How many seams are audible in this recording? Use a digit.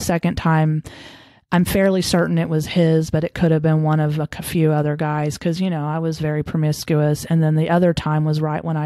0